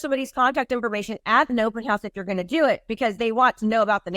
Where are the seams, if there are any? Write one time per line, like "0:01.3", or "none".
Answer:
none